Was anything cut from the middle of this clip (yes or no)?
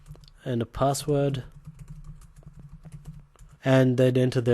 yes